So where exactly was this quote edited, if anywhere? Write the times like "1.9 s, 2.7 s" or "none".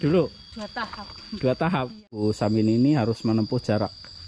2.2 s

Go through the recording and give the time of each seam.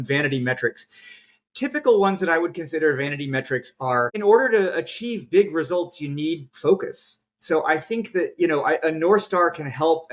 4.2 s

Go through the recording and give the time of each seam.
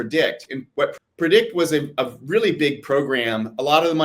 1.0 s

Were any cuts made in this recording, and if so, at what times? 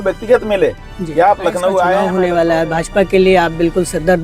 2.1 s

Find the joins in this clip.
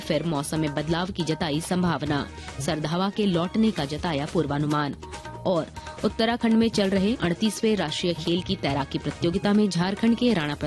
7.2 s

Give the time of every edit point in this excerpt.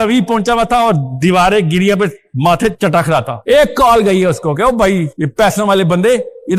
none

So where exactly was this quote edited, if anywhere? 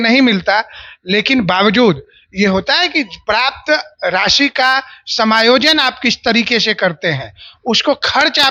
none

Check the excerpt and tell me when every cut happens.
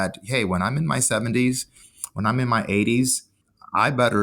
3.2 s

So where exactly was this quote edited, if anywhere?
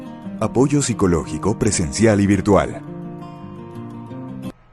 none

